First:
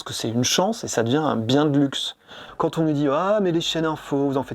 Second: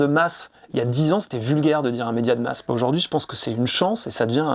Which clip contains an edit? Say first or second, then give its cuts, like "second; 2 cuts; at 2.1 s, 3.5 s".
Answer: first; 1 cut; at 2.4 s